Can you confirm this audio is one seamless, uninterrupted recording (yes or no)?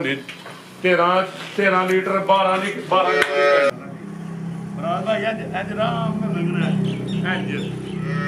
no